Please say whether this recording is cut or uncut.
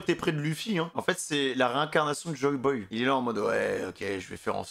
cut